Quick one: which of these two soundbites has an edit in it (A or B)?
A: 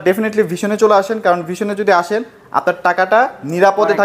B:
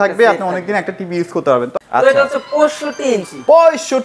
B